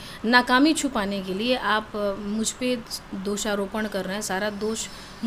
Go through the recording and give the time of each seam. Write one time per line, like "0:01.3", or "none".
none

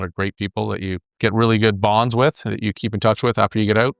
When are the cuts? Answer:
0:02.7

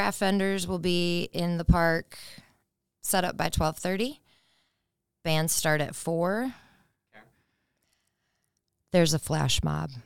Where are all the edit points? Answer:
none

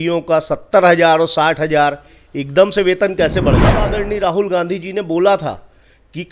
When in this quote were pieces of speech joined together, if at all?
0:03.8

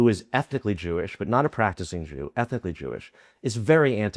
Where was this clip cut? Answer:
none

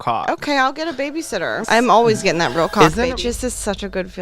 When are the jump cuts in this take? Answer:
0:01.6
0:03.1

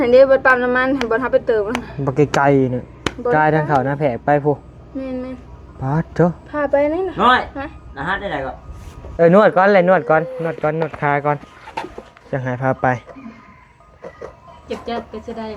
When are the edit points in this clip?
0:09.0

